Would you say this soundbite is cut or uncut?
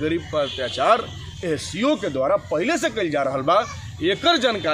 uncut